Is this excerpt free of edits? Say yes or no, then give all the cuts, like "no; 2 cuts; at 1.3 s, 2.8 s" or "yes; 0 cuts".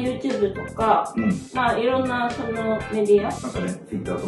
no; 1 cut; at 3.4 s